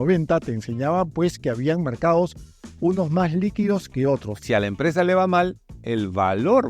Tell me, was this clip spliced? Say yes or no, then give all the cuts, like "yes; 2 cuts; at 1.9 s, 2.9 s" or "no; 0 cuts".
yes; 1 cut; at 4.4 s